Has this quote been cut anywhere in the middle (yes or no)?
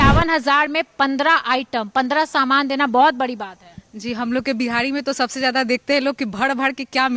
no